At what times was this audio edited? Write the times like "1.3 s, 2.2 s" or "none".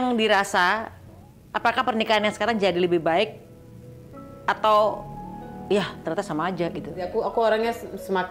7.1 s